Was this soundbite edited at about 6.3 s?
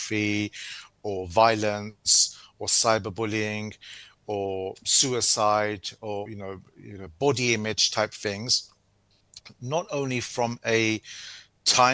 yes; 1 cut; at 6.3 s

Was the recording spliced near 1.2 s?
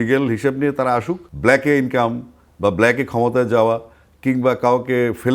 yes; 1 cut; at 1.2 s

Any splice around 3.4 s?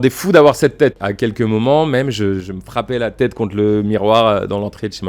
no; 1 cut; at 1.0 s

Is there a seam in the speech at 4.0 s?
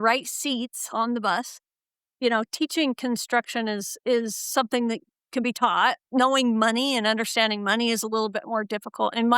no; 2 cuts; at 2.0 s, 6.0 s

